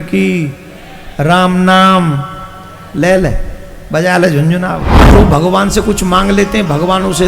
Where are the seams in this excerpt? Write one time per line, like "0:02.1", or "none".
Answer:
0:05.1